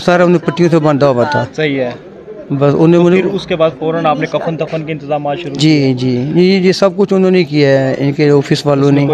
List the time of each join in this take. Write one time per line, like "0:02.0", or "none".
none